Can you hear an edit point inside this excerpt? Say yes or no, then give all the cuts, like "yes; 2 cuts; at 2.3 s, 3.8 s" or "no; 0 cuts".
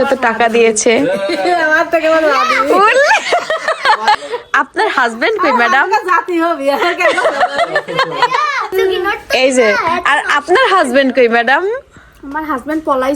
yes; 2 cuts; at 4.2 s, 8.7 s